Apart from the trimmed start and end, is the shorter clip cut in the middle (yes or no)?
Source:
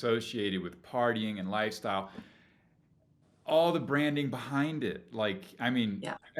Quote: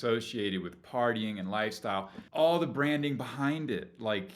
yes